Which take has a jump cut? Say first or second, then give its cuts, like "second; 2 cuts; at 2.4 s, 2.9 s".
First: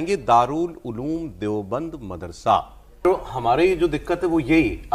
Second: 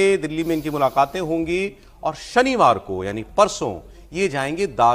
first; 1 cut; at 3.0 s